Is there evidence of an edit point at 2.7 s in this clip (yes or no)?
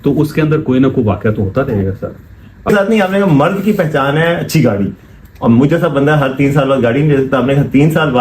yes